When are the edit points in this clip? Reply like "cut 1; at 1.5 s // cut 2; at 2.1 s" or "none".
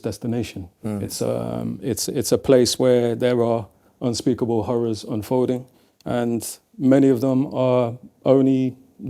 none